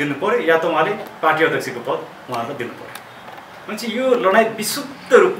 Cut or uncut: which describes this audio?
uncut